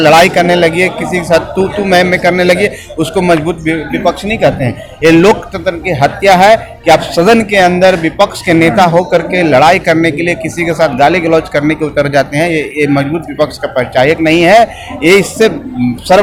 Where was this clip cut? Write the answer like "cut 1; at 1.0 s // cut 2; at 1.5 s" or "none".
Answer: none